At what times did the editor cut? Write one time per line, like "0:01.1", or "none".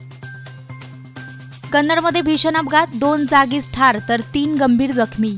none